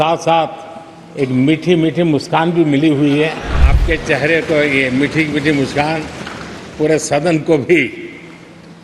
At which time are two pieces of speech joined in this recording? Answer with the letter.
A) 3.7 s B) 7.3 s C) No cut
A